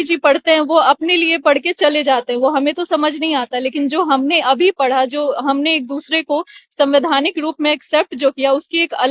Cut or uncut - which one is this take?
uncut